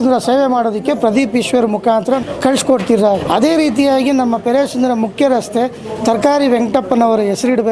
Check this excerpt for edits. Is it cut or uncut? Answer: cut